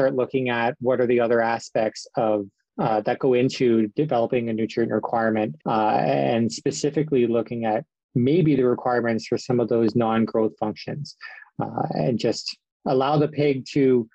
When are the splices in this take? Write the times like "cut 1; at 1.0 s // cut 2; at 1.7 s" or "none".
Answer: cut 1; at 2.6 s // cut 2; at 5.6 s